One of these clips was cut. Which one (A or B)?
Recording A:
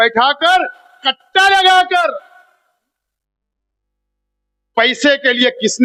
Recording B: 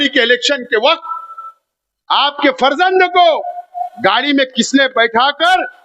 B